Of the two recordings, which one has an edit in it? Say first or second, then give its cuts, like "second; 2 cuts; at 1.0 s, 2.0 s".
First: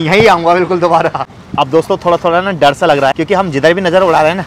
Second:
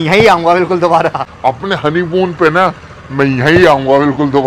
first; 2 cuts; at 1.3 s, 3.2 s